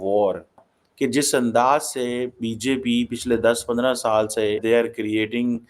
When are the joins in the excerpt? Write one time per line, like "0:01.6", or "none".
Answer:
0:04.6